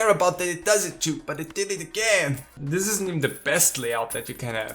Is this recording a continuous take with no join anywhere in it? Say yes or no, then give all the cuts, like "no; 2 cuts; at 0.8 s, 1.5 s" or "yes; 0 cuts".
no; 1 cut; at 2.5 s